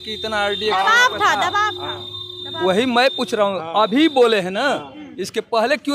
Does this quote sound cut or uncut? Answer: uncut